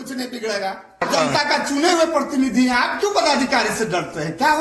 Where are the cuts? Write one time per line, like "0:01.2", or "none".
0:01.1